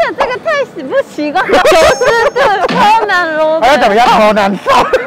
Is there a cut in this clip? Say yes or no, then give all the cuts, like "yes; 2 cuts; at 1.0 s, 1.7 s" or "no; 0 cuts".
yes; 1 cut; at 4.1 s